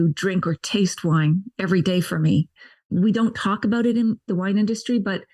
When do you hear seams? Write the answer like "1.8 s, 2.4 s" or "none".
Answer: 2.7 s, 4.3 s